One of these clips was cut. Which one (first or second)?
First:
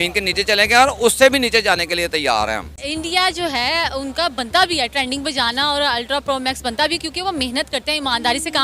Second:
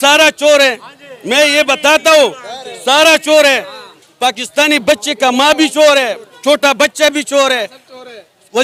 first